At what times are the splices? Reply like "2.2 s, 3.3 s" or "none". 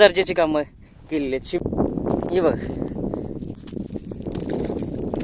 1.3 s, 3.5 s